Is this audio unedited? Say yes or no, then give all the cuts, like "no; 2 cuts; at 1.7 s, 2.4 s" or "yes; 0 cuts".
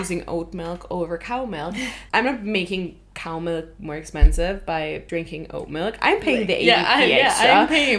no; 2 cuts; at 2.0 s, 5.0 s